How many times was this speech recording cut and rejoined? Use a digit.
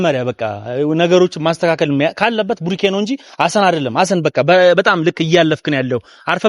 0